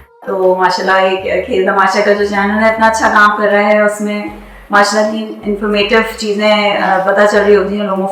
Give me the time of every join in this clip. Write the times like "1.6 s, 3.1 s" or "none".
none